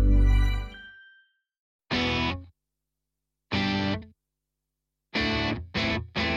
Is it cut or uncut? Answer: cut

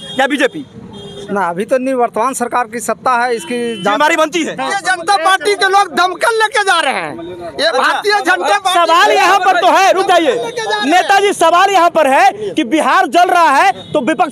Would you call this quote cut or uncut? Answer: cut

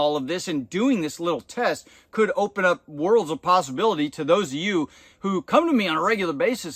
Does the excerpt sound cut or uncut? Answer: uncut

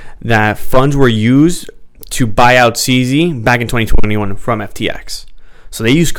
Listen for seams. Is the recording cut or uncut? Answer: uncut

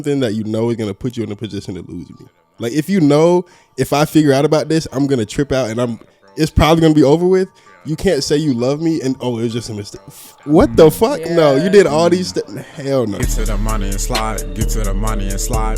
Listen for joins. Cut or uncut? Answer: cut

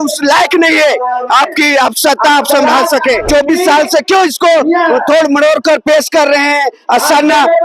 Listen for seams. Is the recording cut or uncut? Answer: cut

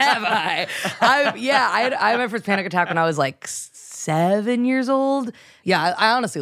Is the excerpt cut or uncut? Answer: cut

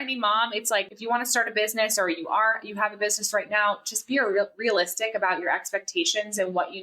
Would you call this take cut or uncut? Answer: cut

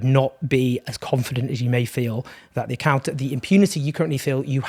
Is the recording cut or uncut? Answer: uncut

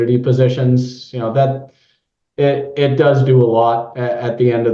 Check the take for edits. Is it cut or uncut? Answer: uncut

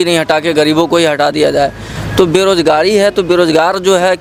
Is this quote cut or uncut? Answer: uncut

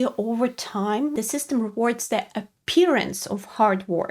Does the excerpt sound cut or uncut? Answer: cut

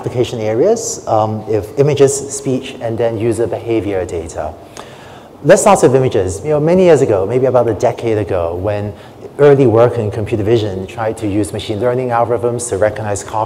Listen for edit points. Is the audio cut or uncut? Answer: cut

